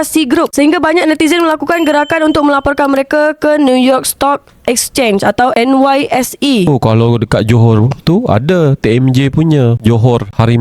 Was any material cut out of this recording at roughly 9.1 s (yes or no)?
no